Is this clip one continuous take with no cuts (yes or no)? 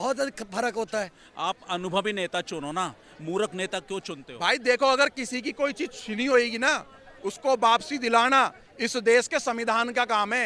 no